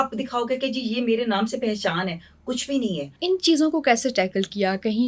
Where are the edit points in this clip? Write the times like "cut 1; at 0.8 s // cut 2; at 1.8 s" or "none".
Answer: cut 1; at 3.1 s